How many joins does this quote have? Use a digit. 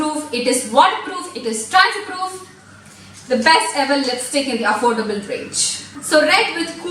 1